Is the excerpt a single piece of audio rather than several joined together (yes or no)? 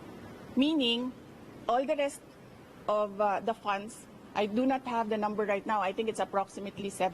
yes